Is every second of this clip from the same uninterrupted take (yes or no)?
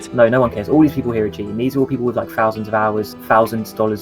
yes